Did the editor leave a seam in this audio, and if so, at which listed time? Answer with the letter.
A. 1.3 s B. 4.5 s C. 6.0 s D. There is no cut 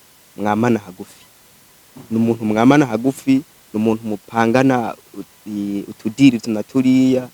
D